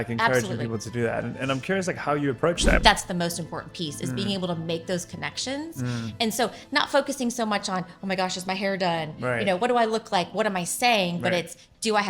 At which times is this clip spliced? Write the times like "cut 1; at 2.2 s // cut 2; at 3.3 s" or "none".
cut 1; at 2.8 s